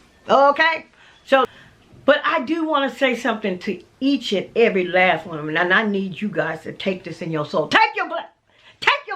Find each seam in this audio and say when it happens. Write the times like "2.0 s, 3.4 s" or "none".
1.5 s

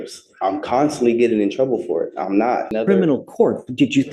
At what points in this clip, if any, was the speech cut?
2.7 s

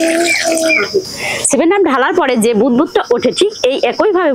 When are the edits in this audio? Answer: 1.2 s

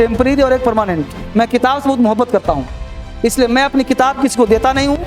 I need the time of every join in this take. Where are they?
1.1 s

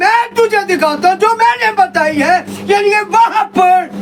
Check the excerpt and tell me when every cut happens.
none

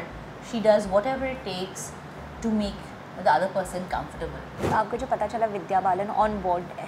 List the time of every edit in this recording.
4.7 s

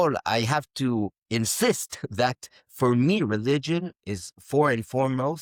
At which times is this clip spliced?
none

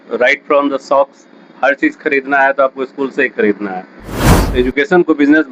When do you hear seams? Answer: 4.4 s

